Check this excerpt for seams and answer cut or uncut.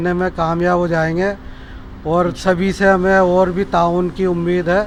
uncut